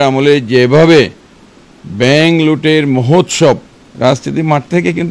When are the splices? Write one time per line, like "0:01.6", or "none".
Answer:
0:03.9